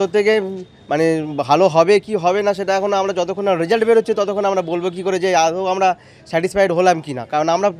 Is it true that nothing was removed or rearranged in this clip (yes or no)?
yes